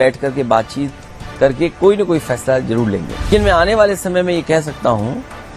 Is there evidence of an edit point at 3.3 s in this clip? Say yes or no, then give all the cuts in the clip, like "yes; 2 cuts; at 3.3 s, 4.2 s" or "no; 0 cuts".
yes; 1 cut; at 3.3 s